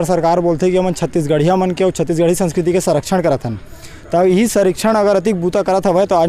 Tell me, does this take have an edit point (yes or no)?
no